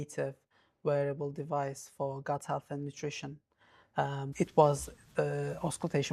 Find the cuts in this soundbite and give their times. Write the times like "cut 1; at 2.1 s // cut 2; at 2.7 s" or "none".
cut 1; at 4.2 s